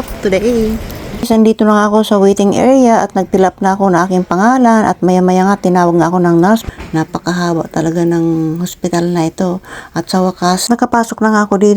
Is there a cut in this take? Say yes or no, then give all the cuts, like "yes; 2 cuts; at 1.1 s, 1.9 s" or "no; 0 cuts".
yes; 3 cuts; at 1.3 s, 6.6 s, 10.6 s